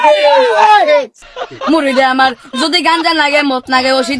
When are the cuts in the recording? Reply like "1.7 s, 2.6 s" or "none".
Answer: 1.2 s